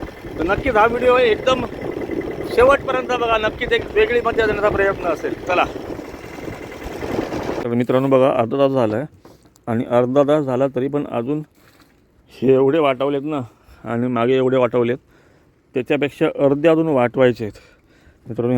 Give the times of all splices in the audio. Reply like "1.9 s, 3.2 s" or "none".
7.6 s

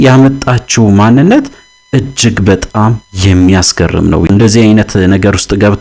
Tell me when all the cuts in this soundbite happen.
4.3 s

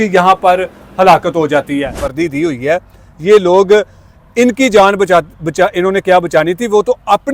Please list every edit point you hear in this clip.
2.1 s

